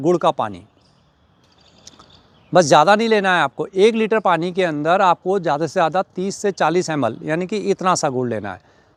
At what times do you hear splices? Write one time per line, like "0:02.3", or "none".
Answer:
none